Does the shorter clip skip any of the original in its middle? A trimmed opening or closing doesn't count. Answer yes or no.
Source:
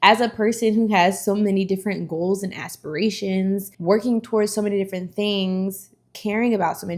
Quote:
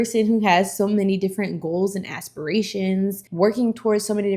no